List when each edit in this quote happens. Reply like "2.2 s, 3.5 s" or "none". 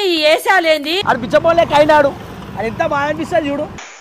0.9 s